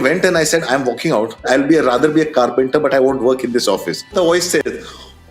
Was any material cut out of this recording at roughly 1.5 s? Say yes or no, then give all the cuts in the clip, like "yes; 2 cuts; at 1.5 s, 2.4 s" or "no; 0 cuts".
yes; 2 cuts; at 1.5 s, 4.1 s